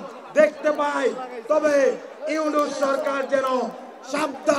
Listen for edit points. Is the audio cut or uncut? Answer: uncut